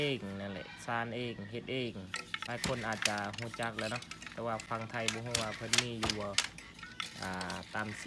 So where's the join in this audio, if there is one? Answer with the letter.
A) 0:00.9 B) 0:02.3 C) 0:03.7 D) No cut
B